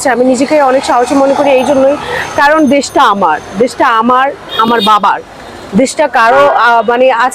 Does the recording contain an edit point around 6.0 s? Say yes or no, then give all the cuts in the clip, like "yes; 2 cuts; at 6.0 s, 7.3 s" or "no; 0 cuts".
no; 0 cuts